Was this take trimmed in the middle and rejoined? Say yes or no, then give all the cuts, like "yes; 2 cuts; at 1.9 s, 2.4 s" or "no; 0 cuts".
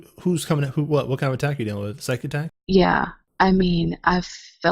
yes; 2 cuts; at 2.6 s, 3.2 s